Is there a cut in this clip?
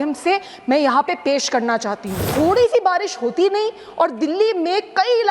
yes; 1 cut; at 2.3 s

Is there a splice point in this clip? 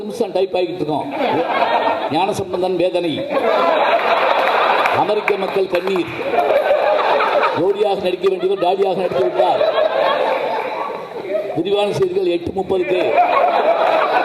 no; 0 cuts

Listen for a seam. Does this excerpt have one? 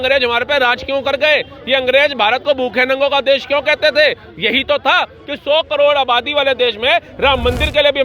no; 0 cuts

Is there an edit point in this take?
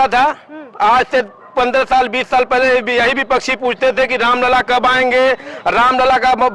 no; 0 cuts

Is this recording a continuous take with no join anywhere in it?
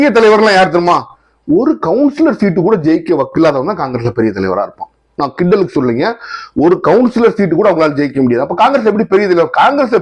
yes; 0 cuts

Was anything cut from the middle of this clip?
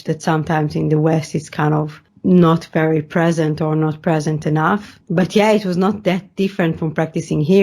yes; 2 cuts; at 2.0 s, 5.0 s

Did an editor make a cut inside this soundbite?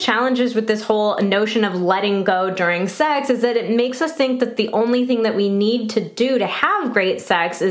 no; 0 cuts

